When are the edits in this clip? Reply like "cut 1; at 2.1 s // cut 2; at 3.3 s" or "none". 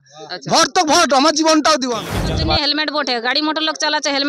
cut 1; at 2.2 s